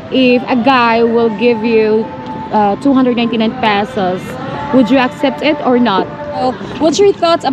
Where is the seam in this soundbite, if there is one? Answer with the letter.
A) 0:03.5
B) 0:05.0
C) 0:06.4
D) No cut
C